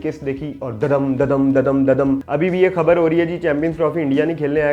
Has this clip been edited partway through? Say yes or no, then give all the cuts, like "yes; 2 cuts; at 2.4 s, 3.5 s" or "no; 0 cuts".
yes; 1 cut; at 2.3 s